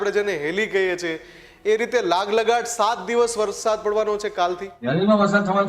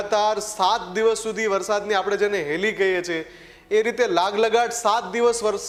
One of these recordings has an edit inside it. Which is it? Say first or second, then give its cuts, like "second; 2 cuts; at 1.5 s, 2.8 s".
first; 1 cut; at 4.7 s